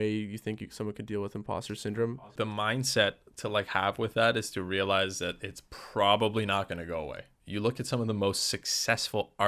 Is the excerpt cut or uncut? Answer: cut